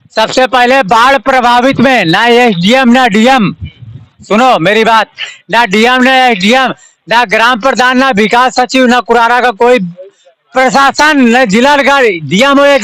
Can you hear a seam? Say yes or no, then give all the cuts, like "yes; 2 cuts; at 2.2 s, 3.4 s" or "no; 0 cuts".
no; 0 cuts